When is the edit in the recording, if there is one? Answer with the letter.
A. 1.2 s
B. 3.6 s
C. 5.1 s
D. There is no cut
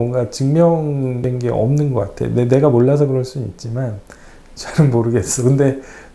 A